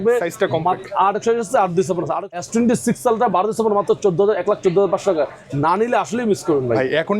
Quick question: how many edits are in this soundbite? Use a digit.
1